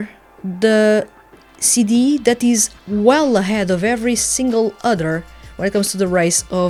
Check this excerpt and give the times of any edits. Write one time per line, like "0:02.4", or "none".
none